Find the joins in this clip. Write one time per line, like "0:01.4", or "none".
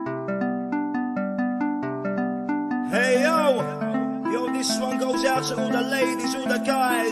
none